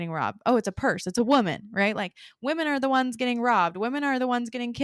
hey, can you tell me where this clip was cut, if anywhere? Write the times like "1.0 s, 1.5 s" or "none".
none

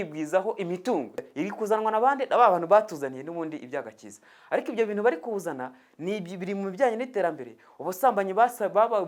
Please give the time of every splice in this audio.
1.2 s

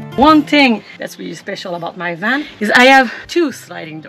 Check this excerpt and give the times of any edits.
1.0 s, 2.5 s, 3.2 s

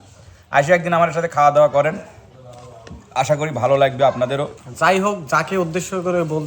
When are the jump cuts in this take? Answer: 4.6 s

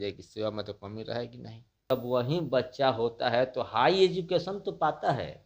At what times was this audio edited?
1.9 s

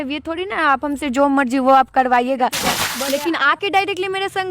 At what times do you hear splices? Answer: 2.8 s

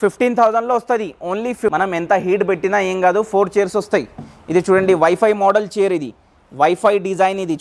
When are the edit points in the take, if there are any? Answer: 1.7 s

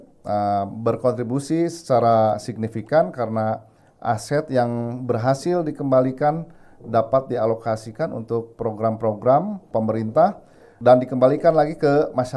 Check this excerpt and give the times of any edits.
none

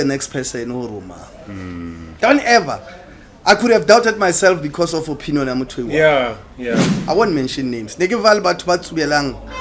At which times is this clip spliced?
6.8 s

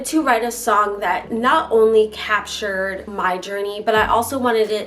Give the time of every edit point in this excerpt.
1.3 s, 3.0 s

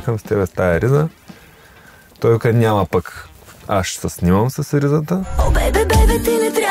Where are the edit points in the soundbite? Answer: 5.3 s

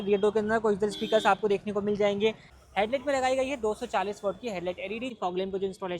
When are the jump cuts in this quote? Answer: 2.5 s, 5.1 s

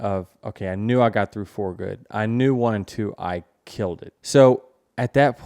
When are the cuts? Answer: 4.1 s

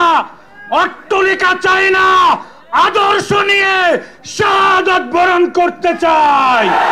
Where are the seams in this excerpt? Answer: none

